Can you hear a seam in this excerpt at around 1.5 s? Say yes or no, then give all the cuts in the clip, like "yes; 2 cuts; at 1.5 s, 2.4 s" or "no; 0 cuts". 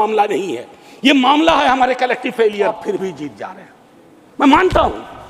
no; 1 cut; at 2.8 s